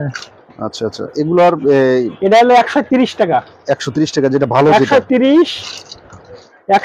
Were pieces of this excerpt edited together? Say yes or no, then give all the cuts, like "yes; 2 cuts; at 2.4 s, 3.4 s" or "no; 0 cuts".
no; 0 cuts